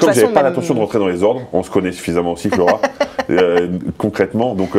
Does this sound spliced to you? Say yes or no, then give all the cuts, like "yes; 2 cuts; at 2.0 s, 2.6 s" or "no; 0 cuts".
no; 0 cuts